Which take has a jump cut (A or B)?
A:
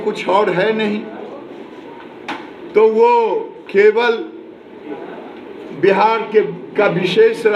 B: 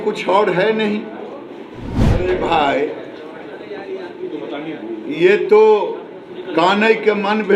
B